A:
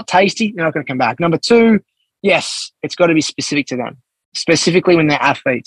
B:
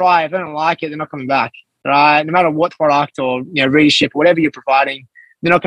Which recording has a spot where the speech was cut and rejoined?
B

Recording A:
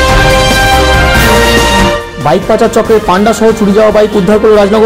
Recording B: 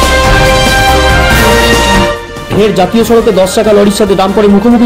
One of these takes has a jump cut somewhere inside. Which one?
B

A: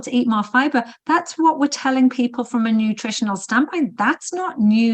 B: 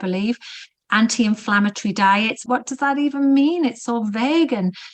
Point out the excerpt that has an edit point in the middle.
B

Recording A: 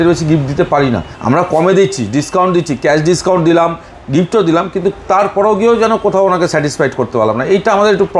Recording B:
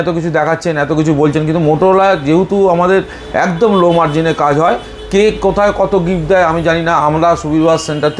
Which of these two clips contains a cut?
A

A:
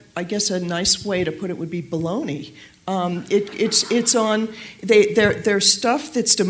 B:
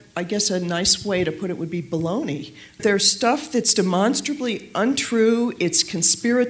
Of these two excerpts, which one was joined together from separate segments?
B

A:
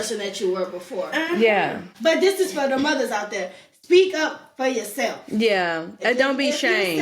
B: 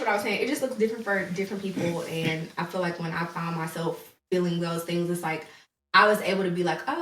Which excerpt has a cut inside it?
A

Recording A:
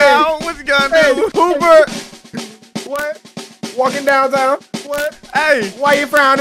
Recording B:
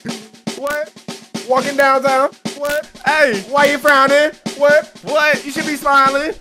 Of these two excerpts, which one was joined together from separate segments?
A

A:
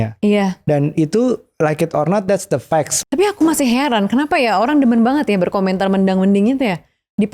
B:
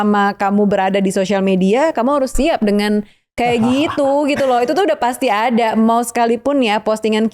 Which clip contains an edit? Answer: A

